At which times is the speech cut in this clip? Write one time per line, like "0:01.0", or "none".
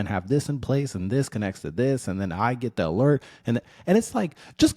none